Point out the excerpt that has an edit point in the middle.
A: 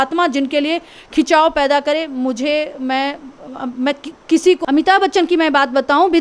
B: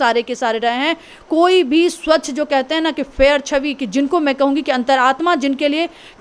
A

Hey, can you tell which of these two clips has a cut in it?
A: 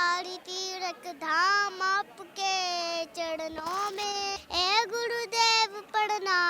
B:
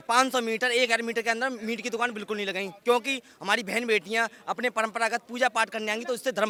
A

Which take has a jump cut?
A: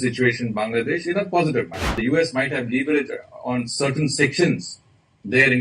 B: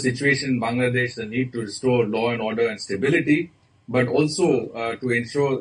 A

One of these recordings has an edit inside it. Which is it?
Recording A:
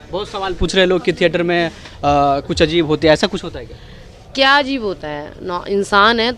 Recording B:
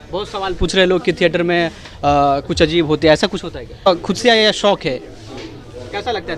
B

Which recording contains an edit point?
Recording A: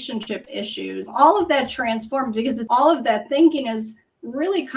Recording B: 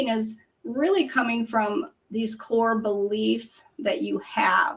A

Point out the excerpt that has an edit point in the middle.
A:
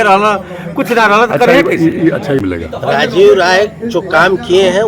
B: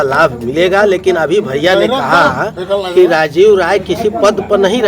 A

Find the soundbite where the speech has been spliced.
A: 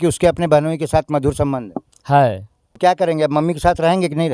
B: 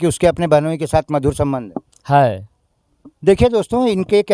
A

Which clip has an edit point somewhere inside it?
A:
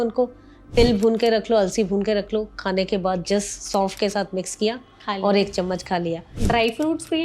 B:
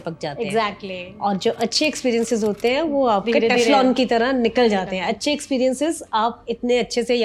A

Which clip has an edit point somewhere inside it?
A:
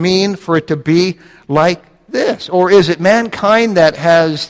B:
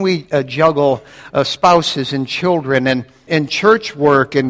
B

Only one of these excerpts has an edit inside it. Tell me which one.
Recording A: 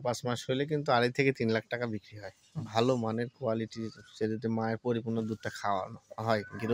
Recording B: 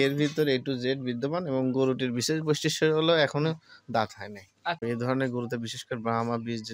B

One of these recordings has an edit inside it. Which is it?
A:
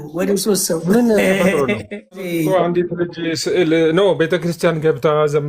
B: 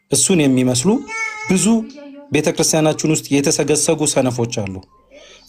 A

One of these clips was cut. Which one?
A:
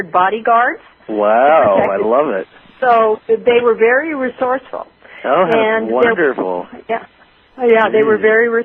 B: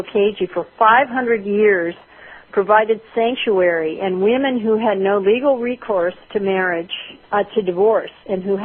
B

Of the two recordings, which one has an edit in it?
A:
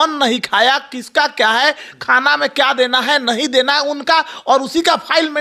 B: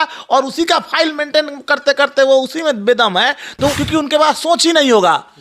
B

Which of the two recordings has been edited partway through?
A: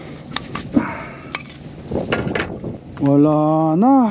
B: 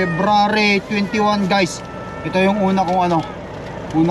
A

